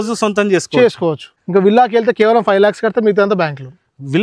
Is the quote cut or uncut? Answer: cut